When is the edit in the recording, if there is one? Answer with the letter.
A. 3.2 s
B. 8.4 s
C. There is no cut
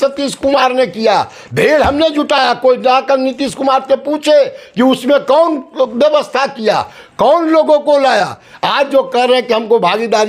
B